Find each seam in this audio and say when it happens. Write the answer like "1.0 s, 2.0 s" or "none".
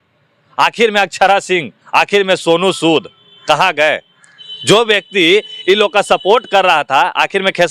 none

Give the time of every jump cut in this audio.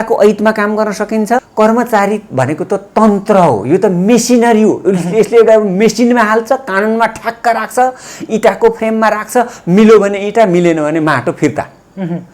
1.5 s

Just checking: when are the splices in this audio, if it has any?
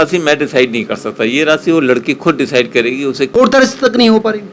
3.3 s

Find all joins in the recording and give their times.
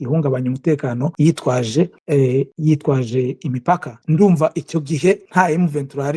1.1 s, 2.2 s, 3.9 s, 5.2 s

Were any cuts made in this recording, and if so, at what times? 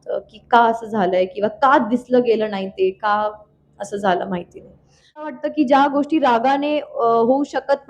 5.3 s

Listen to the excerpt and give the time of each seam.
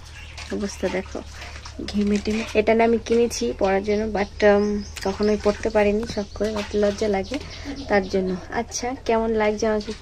2.4 s

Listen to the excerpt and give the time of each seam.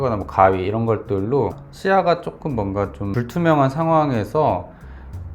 1.6 s, 3.1 s

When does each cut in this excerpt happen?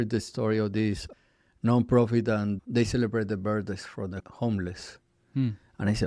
1.1 s, 2.6 s, 4.2 s

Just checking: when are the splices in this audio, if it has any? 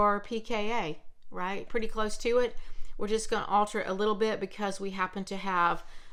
none

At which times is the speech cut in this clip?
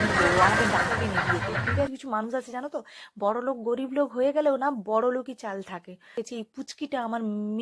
1.9 s, 6.2 s

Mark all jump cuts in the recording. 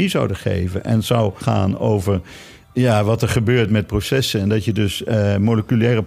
1.4 s

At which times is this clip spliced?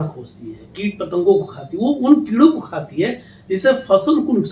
none

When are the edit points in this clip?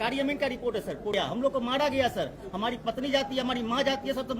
1.1 s

